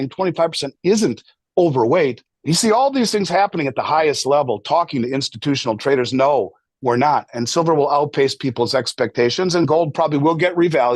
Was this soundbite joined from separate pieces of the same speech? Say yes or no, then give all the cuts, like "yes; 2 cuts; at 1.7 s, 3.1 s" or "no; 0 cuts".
yes; 1 cut; at 2.3 s